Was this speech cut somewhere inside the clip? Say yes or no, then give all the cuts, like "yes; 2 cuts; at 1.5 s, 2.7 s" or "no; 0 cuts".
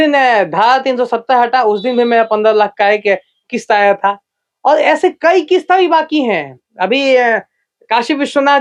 no; 0 cuts